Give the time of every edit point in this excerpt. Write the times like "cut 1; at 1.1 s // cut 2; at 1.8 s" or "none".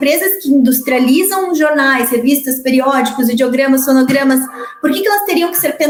none